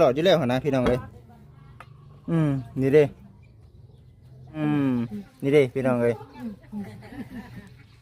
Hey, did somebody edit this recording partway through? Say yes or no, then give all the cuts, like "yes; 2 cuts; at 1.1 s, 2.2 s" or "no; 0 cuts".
yes; 1 cut; at 4.6 s